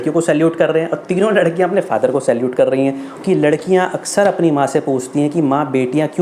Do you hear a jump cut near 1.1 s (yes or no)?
no